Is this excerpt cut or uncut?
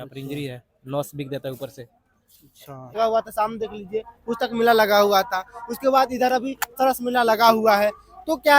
cut